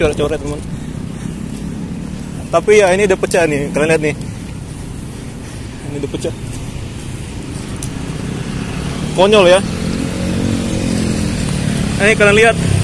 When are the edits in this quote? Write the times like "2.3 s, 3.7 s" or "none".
none